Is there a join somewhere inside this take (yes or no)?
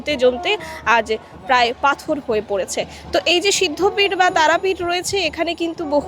no